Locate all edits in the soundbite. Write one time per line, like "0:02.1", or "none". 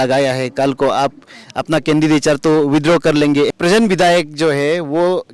0:03.5

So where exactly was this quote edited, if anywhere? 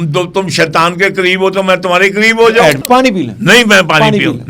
0:02.8

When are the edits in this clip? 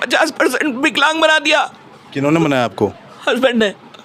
none

